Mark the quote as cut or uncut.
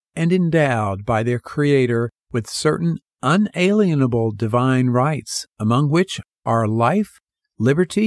cut